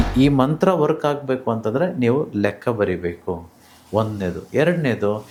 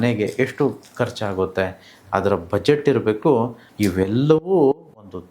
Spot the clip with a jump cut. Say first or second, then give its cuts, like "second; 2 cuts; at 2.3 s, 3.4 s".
second; 1 cut; at 3.6 s